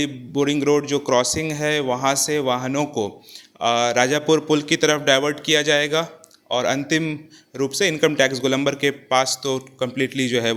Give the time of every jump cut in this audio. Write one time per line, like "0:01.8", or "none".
none